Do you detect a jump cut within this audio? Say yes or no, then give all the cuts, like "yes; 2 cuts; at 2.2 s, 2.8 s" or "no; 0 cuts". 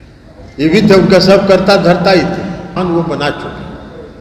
yes; 1 cut; at 2.7 s